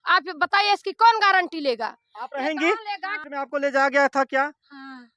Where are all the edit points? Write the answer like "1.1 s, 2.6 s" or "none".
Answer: 3.5 s